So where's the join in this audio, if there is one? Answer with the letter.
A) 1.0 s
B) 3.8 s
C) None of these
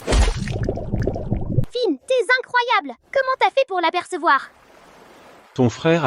A